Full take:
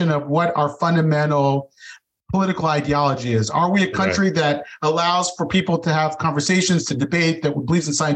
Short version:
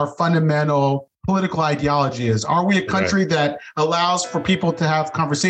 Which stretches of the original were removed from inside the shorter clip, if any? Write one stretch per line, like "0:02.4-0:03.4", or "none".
0:01.7-0:02.2

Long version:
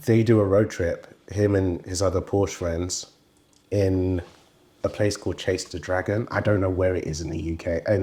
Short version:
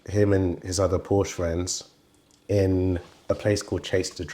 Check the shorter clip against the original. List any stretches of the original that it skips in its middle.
0:04.3-0:04.7

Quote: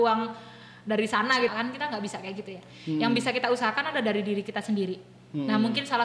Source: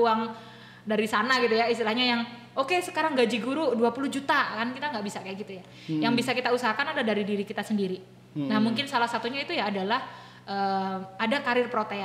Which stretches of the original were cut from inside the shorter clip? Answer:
0:01.5-0:04.5

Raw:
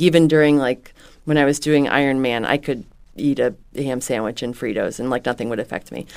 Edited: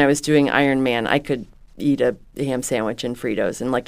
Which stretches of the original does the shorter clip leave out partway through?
none

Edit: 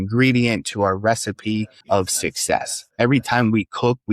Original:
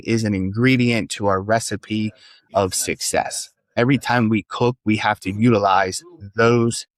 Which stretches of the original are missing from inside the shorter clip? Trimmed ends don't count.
0:02.2-0:02.4
0:03.4-0:03.6

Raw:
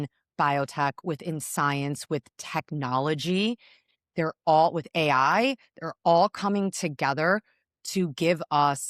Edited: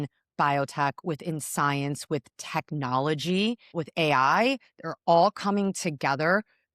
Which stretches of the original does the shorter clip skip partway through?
0:03.8-0:04.8

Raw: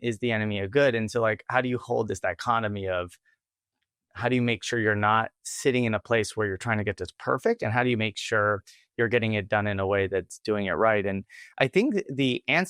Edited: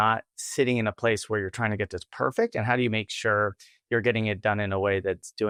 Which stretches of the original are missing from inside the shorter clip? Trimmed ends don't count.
none

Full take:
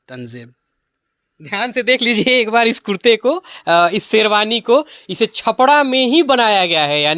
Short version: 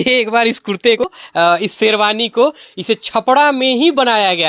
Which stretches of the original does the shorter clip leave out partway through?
0:03.2-0:03.3

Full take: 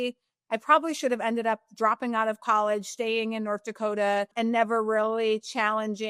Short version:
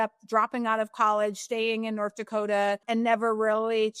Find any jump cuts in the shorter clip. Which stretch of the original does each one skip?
none

